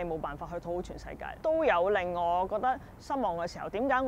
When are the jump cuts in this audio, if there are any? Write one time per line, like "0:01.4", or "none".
0:01.4